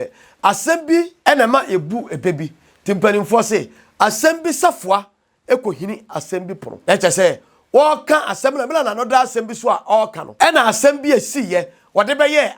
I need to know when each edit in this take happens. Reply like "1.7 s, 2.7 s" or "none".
1.1 s, 6.6 s, 10.2 s